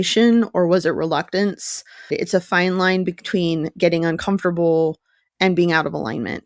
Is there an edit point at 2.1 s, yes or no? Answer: yes